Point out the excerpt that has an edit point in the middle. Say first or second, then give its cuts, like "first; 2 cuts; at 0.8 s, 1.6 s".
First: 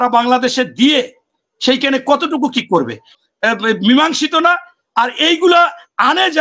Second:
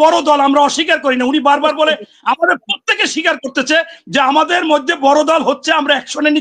first; 1 cut; at 3.2 s